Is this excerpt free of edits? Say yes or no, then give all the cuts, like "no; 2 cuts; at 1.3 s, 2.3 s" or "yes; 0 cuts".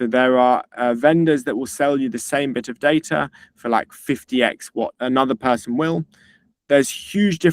no; 1 cut; at 5.0 s